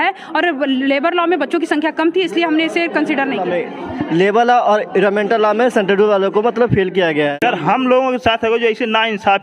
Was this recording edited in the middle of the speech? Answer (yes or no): yes